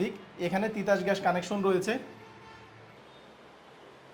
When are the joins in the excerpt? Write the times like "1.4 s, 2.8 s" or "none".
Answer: 2.9 s